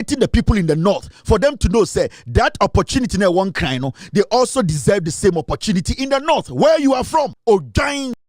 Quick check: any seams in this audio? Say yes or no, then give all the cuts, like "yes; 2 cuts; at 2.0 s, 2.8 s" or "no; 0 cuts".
yes; 1 cut; at 7.4 s